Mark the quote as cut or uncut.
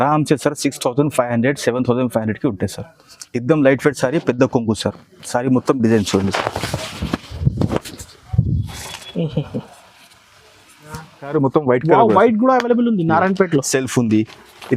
cut